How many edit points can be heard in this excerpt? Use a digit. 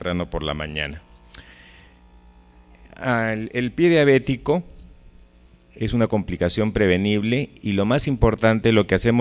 0